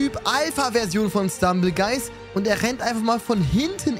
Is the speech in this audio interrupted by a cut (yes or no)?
yes